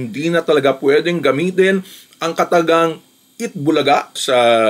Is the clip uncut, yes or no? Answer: yes